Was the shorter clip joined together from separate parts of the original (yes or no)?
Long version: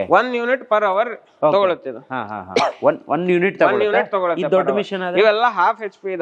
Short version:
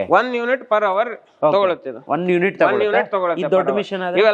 yes